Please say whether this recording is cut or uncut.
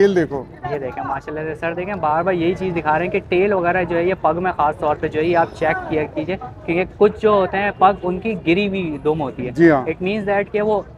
uncut